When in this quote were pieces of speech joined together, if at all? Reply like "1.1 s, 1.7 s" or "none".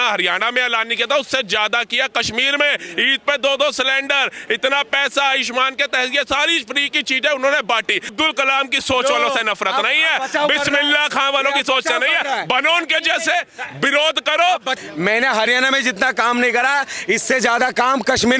8.1 s, 14.7 s